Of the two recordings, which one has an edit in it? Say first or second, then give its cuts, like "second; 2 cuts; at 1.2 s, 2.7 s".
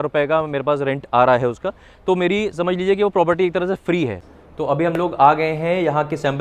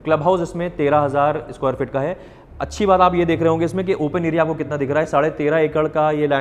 first; 1 cut; at 4.4 s